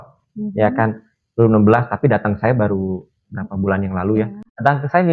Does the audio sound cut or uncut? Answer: uncut